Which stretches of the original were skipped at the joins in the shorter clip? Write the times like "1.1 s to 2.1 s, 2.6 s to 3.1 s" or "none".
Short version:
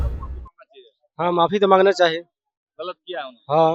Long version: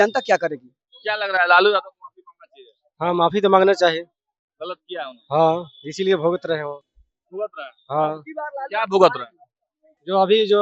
none